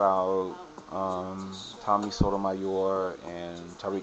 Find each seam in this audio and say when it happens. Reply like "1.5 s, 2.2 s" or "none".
1.3 s

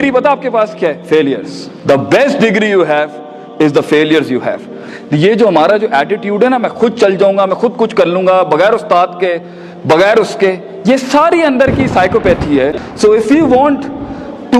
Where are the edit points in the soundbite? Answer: 12.9 s

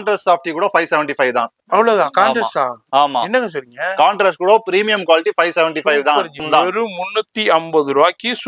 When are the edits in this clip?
6.4 s

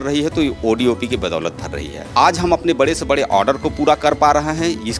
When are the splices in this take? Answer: 2.1 s

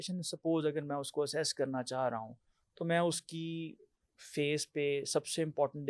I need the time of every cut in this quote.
none

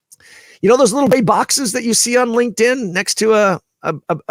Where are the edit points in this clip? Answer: none

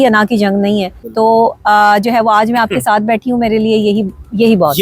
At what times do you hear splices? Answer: 1.0 s

